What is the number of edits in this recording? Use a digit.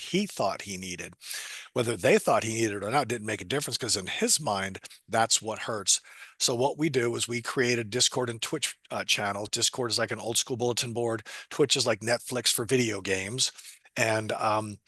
0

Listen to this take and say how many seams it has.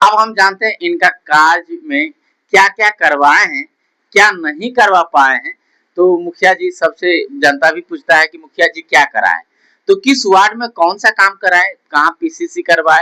0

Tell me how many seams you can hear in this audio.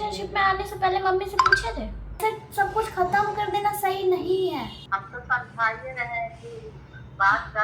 2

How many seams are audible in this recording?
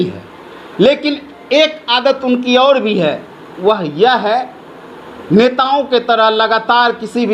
0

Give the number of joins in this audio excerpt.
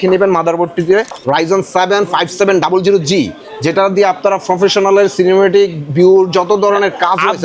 1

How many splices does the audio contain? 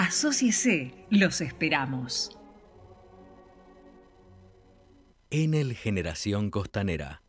1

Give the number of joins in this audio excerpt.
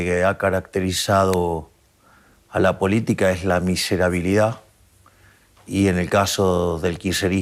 0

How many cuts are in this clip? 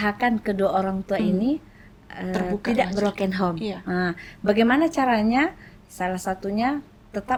0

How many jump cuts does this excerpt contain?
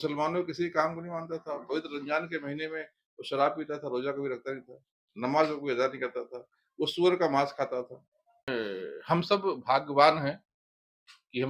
1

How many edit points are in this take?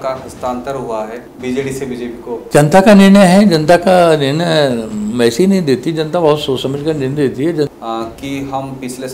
3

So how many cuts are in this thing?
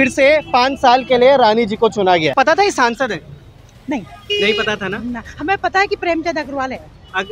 1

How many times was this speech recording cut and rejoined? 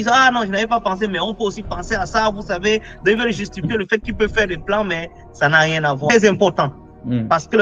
1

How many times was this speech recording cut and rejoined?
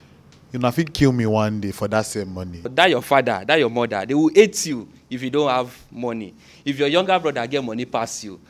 1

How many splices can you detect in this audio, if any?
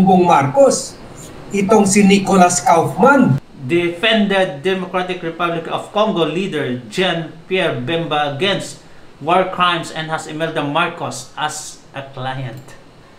1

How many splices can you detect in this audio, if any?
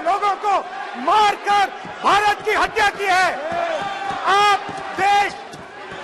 0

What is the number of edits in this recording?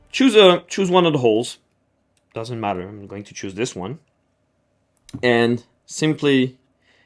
0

